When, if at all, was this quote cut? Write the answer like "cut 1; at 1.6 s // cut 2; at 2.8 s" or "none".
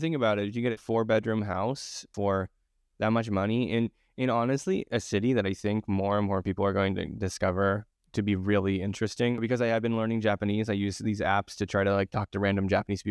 cut 1; at 0.7 s // cut 2; at 2.1 s // cut 3; at 7.9 s // cut 4; at 9.4 s